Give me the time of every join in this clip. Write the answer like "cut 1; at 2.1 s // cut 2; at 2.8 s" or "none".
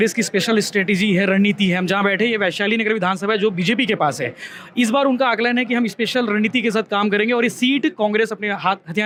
none